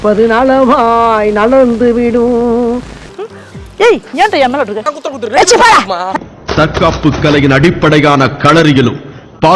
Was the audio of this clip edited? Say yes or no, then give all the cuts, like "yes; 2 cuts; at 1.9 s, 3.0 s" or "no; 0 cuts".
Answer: yes; 1 cut; at 4.8 s